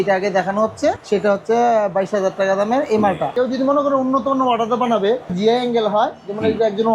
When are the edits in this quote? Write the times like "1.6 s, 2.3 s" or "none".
1.0 s, 3.3 s, 5.3 s